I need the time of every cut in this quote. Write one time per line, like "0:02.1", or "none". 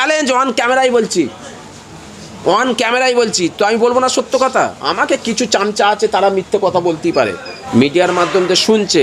0:07.6